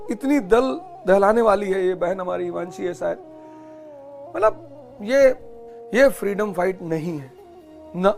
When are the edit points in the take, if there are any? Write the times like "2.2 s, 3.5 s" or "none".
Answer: none